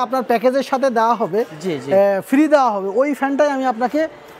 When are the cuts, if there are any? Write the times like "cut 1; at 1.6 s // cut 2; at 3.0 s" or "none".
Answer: none